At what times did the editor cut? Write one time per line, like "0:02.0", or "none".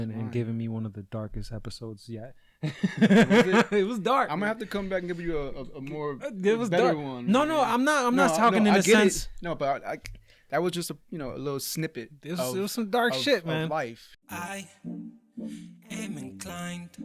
0:14.1